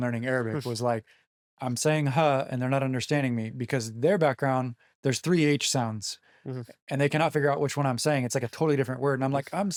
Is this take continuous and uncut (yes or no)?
yes